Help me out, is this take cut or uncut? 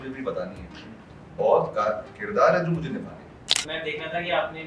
cut